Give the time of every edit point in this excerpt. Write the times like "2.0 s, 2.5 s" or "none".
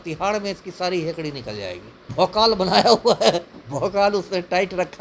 2.1 s